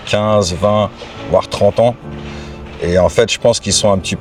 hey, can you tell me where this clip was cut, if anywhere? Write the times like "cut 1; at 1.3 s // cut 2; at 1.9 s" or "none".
none

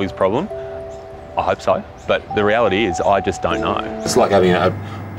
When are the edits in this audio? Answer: cut 1; at 4.1 s

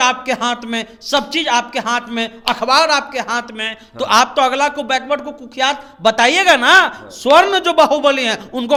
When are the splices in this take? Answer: none

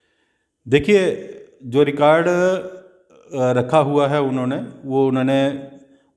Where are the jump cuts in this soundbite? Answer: none

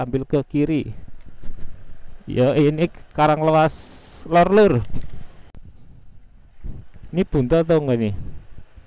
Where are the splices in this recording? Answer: cut 1; at 5.5 s

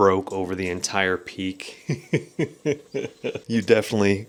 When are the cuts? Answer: none

